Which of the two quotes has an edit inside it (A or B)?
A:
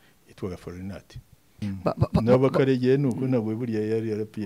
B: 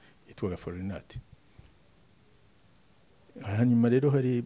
A